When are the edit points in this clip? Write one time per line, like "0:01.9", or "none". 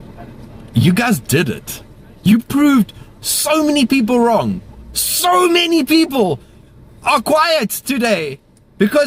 none

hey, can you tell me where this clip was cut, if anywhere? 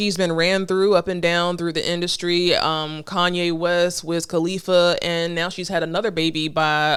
none

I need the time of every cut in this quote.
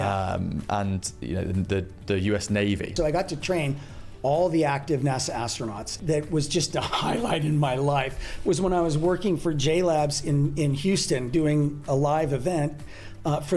0:02.9
0:05.9

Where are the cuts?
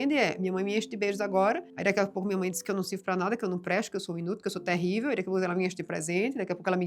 none

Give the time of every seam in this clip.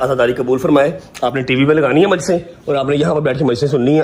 none

